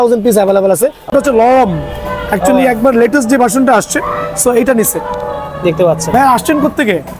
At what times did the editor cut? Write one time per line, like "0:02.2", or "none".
0:01.1